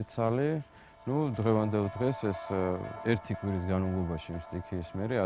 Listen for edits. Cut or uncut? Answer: uncut